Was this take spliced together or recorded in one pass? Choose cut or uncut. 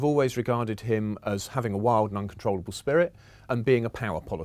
cut